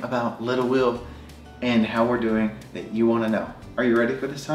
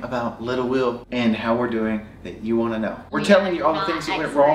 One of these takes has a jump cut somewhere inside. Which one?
second; 2 cuts; at 1.0 s, 3.0 s

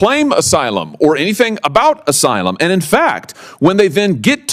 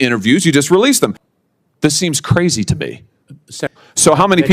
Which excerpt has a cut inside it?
second; 2 cuts; at 1.2 s, 3.7 s

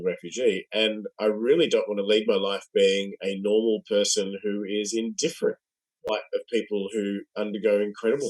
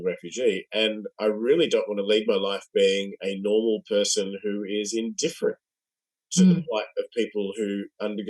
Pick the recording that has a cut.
first; 1 cut; at 6.0 s

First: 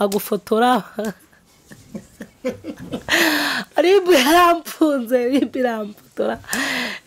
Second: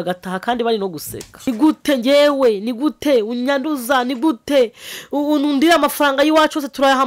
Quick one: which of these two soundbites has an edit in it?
second; 1 cut; at 1.4 s

